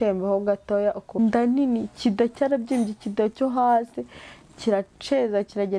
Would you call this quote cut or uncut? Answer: cut